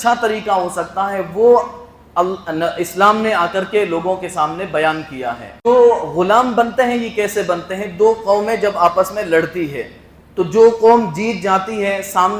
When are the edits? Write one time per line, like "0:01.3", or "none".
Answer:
0:05.7